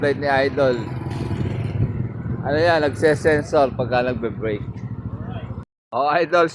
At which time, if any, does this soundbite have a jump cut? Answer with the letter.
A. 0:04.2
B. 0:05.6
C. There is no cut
B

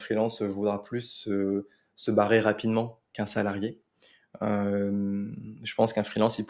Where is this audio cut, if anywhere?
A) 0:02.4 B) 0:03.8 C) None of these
C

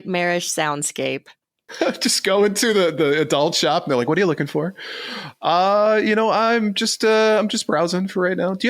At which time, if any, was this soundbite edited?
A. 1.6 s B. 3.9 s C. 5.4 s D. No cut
A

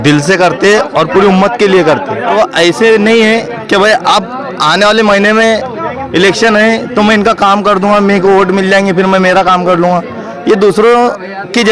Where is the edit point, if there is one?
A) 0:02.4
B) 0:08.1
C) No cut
A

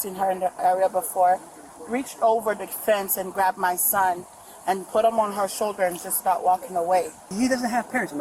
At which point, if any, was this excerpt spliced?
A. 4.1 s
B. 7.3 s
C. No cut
B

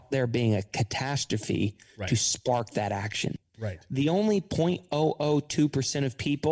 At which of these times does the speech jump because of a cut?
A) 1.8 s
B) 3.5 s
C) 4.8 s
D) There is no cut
B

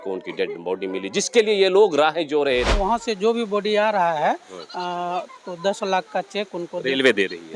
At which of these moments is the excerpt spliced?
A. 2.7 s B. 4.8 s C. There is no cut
A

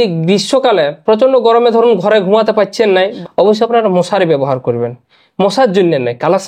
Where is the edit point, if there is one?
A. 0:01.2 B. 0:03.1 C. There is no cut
B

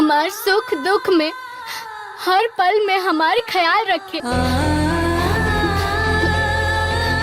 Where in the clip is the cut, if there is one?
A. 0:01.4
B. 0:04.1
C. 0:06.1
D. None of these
B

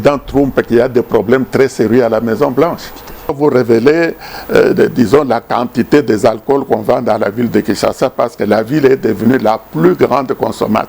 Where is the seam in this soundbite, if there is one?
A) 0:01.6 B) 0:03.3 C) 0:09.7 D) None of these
B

